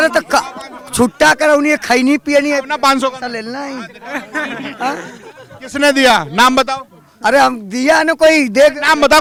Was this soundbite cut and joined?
no; 0 cuts

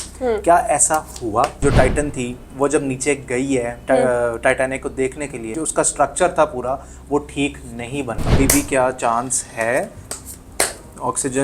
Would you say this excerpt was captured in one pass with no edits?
no; 3 cuts; at 1.6 s, 5.5 s, 8.2 s

